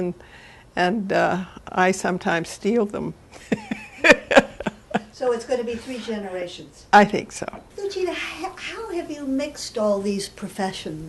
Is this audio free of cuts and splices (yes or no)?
no